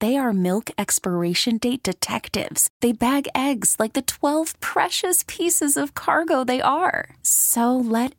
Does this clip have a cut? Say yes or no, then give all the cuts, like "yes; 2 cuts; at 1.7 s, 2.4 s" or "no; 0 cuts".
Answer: no; 0 cuts